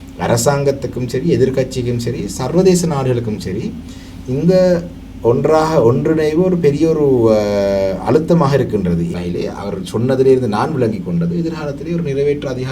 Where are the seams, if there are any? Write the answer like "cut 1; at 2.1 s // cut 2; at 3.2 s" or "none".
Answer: cut 1; at 9.1 s